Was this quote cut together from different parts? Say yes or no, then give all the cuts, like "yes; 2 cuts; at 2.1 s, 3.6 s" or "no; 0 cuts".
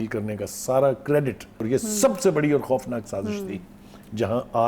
yes; 1 cut; at 1.6 s